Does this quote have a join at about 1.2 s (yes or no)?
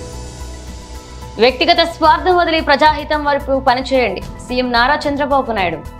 yes